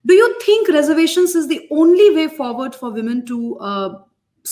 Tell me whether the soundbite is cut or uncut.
uncut